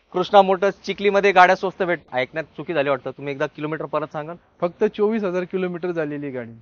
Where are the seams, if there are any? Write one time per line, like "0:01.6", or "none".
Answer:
0:02.1